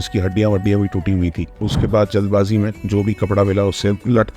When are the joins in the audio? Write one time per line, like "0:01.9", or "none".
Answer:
0:01.7